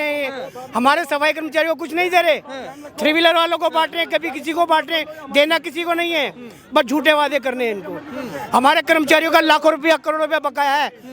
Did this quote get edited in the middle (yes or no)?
no